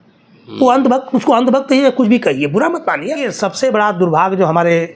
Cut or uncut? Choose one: cut